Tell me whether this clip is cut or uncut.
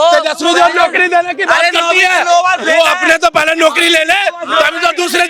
uncut